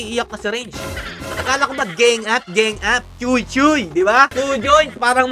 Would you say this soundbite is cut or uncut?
cut